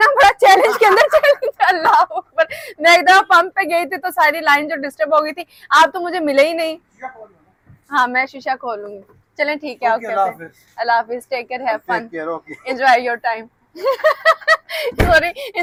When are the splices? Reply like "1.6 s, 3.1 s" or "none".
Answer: none